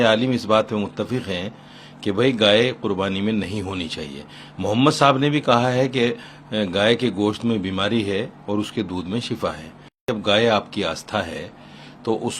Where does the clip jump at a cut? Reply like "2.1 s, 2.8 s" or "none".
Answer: 10.1 s